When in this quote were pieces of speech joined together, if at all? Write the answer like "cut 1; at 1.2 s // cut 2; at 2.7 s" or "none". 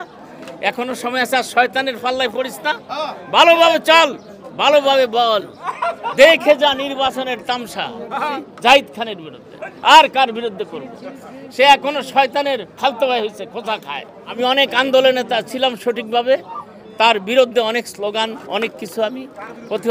cut 1; at 8.4 s // cut 2; at 14.4 s